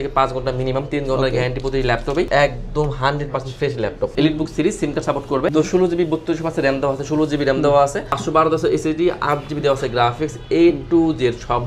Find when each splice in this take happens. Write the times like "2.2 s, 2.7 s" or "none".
2.3 s, 4.1 s, 5.5 s, 8.2 s